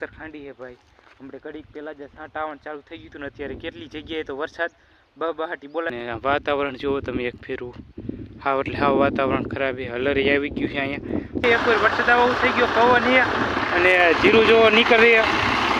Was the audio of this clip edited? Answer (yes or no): yes